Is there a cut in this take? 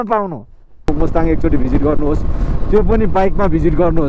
yes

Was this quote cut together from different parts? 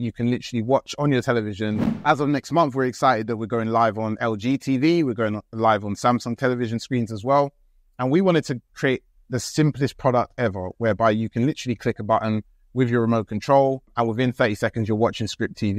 yes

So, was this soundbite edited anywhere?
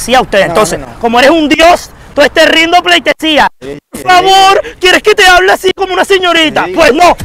no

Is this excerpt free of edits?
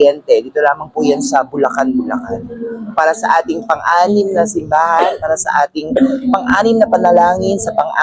yes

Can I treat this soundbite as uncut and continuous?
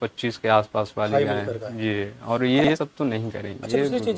yes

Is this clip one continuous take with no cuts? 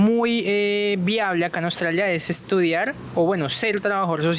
yes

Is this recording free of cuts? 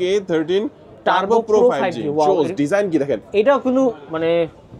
yes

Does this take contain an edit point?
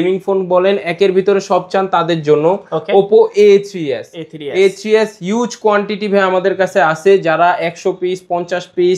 no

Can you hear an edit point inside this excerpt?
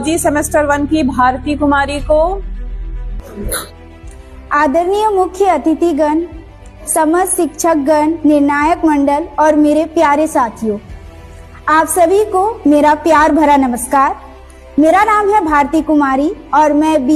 no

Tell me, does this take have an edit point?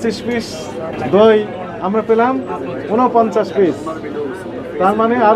yes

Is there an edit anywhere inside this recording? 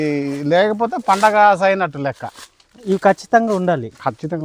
no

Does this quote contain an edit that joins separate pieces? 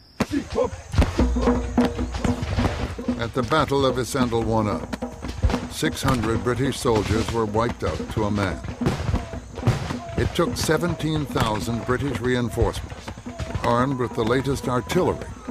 yes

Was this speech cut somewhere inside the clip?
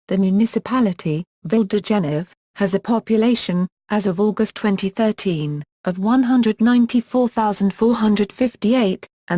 no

